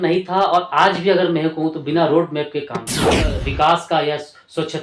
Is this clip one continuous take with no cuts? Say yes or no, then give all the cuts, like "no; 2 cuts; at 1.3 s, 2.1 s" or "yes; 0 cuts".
no; 1 cut; at 3.1 s